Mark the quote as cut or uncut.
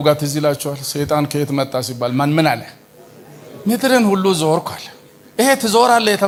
uncut